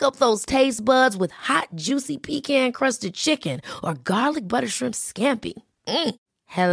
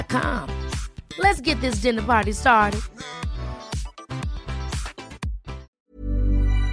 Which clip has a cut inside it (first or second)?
second